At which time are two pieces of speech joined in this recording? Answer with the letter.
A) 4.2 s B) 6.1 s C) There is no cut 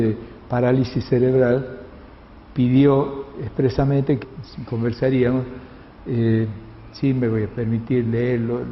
C